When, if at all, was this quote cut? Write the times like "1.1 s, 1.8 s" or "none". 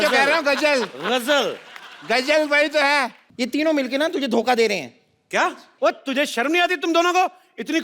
3.2 s